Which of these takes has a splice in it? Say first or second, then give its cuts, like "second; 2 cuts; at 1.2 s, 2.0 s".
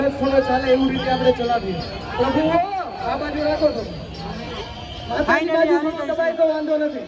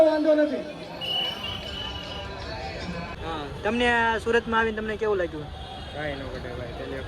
second; 1 cut; at 3.1 s